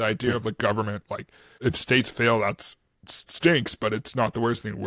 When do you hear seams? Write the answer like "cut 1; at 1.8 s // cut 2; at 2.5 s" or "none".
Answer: cut 1; at 1.6 s

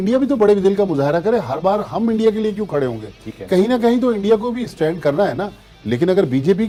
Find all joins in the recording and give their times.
none

